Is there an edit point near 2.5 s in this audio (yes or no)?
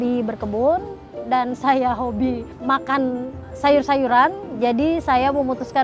yes